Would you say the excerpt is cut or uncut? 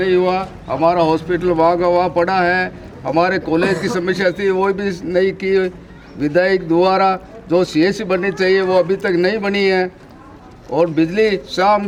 uncut